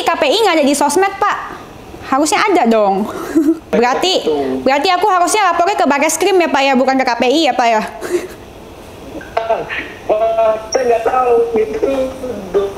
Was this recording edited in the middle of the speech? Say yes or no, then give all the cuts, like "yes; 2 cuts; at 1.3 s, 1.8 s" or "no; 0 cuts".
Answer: yes; 1 cut; at 3.7 s